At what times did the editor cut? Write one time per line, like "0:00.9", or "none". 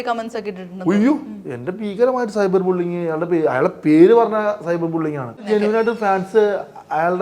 0:05.4